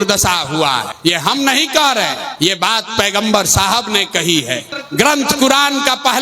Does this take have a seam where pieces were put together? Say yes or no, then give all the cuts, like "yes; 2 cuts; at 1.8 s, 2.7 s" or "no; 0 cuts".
yes; 3 cuts; at 0.9 s, 2.2 s, 4.8 s